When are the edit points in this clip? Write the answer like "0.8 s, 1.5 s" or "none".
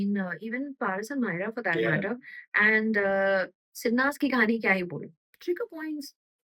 5.2 s

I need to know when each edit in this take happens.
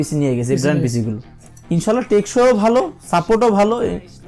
1.3 s

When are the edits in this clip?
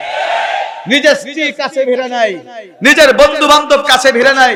none

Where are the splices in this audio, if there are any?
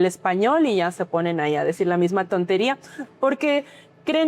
none

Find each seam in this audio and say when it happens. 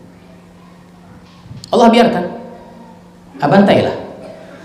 1.3 s

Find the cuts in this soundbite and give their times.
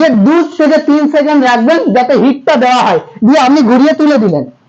none

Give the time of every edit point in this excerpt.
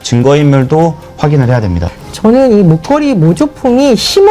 1.8 s

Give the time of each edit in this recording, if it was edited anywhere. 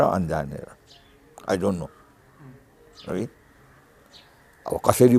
none

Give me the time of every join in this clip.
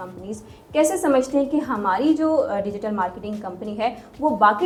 none

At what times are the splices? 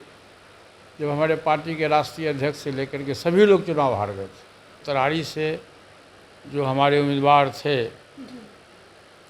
4.8 s

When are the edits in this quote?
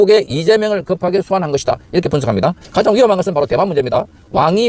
2.6 s

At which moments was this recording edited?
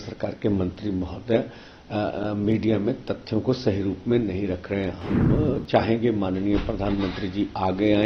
none

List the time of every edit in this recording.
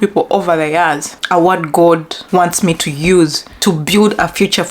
1.1 s, 2.1 s, 3.5 s

